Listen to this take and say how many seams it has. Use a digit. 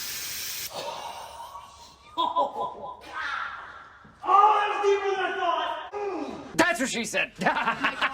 1